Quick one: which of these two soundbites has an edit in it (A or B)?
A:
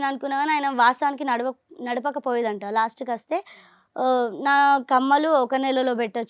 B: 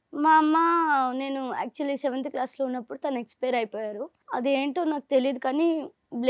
B